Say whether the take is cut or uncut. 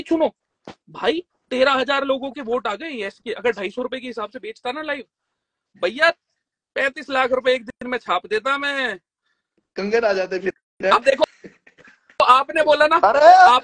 uncut